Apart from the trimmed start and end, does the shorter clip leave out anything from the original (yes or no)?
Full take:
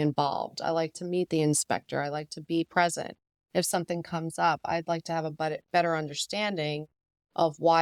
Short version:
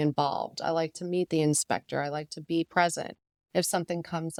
no